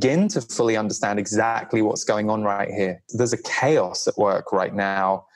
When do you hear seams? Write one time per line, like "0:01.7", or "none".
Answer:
0:03.0